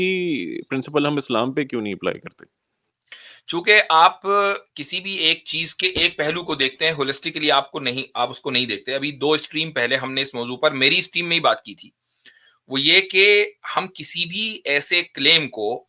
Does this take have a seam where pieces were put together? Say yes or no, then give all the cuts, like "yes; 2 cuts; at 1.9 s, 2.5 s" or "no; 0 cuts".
no; 0 cuts